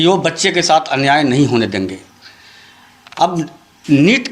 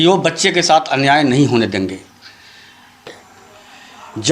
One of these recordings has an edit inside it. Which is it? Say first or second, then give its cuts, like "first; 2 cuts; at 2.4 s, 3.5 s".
second; 1 cut; at 3.1 s